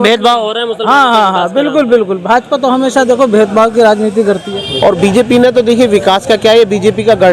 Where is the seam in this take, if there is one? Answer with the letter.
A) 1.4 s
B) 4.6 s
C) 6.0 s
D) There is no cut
B